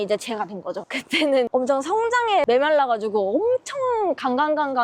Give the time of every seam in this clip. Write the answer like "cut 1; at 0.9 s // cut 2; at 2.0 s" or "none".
cut 1; at 1.3 s // cut 2; at 2.4 s